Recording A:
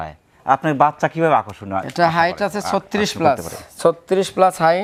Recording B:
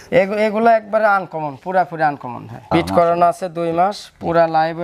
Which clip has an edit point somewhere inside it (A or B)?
B